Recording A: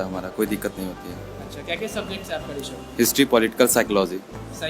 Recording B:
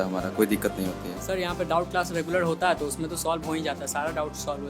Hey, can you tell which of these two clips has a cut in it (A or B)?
B